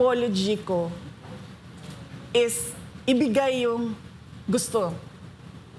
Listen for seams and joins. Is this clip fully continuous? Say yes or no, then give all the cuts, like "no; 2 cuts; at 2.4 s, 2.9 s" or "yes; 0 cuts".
yes; 0 cuts